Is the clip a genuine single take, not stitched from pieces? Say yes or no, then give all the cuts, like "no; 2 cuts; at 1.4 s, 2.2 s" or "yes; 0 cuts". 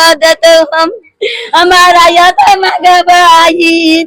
yes; 0 cuts